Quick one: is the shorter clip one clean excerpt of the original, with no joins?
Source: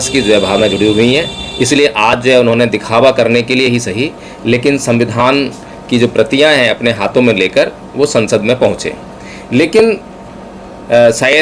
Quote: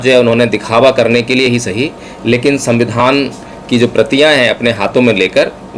yes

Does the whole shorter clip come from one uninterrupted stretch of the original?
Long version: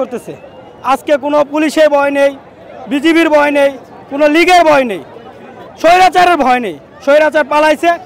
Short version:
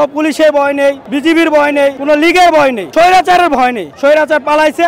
no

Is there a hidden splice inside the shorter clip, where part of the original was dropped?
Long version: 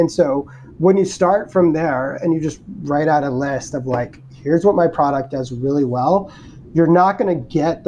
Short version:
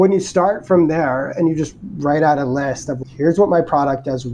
yes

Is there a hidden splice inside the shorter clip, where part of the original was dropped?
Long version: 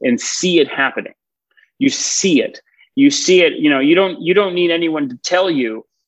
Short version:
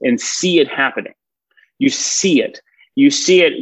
no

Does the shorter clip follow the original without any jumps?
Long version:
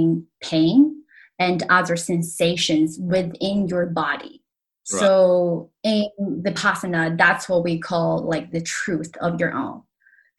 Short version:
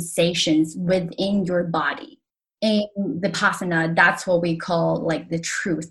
no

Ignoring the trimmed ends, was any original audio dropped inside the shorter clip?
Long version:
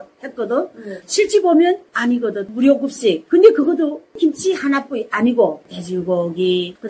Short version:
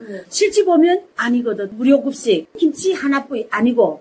yes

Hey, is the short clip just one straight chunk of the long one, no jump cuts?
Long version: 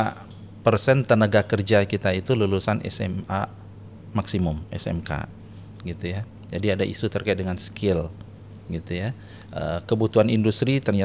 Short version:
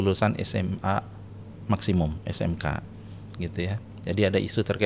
yes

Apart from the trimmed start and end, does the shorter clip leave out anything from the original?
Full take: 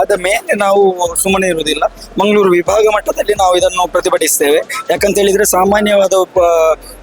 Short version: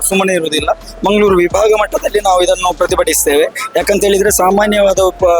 no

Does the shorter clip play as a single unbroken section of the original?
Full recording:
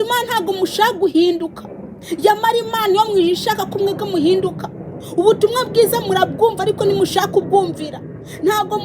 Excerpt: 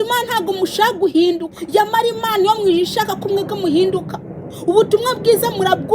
no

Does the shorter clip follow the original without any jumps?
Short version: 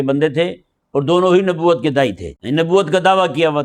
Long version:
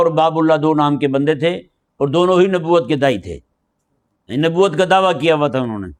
no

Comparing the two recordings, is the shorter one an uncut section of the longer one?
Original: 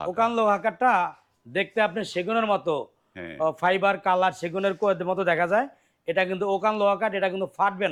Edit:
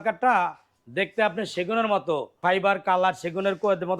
no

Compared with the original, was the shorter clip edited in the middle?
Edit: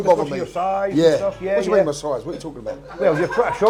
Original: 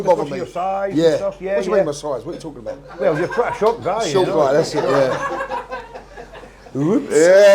no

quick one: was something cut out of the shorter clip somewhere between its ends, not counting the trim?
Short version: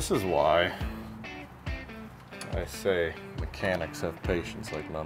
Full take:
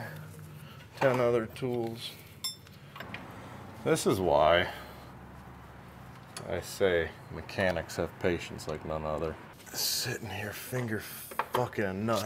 no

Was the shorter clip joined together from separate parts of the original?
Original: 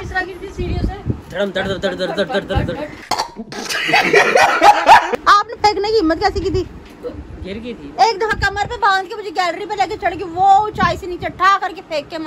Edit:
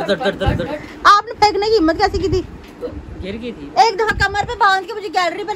yes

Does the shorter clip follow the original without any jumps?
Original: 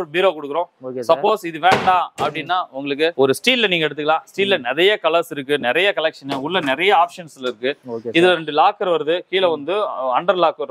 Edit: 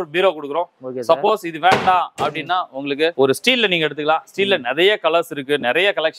yes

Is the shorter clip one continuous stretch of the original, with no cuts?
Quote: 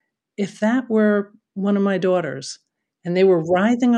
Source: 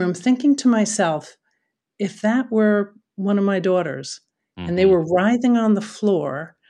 yes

